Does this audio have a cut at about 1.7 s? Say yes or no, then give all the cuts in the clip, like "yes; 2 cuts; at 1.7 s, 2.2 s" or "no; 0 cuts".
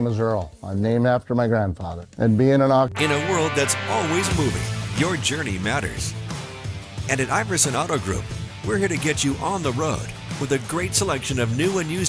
no; 1 cut; at 2.9 s